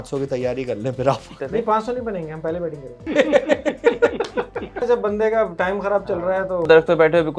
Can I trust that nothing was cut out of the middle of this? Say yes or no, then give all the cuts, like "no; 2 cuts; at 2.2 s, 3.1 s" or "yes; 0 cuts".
no; 4 cuts; at 1.4 s, 3.0 s, 4.8 s, 6.7 s